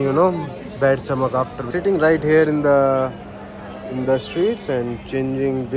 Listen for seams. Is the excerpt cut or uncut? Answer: cut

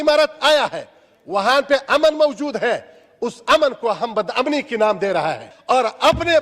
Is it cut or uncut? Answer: cut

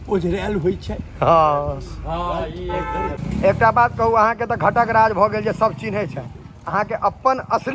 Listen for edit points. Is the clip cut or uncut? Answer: cut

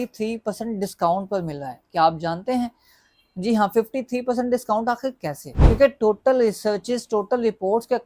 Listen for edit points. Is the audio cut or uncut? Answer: uncut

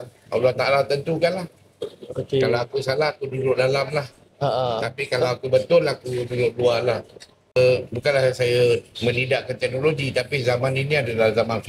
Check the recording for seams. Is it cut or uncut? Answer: cut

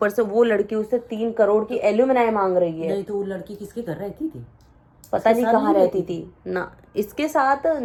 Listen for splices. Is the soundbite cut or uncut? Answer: uncut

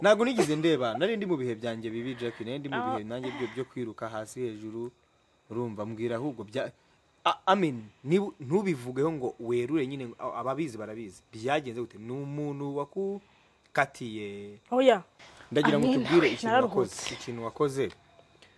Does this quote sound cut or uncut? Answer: cut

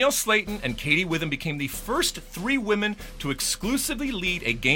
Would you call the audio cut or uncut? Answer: uncut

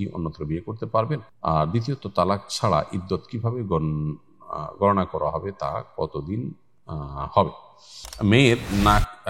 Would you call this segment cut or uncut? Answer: cut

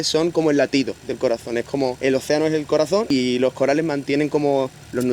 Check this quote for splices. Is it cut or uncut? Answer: cut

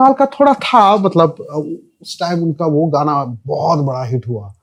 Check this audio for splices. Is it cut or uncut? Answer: uncut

